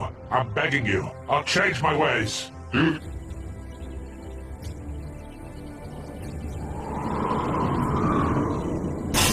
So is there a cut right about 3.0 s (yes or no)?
yes